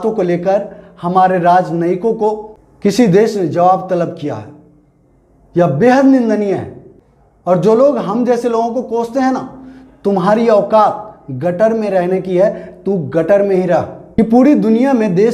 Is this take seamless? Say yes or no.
no